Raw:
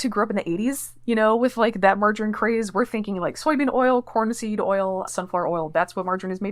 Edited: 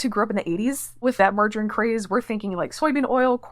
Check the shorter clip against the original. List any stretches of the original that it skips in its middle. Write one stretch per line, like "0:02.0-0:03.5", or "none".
0:01.1-0:01.7